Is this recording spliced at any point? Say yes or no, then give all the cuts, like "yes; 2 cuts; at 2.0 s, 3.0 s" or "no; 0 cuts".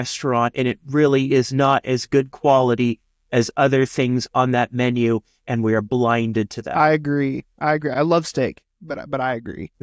no; 0 cuts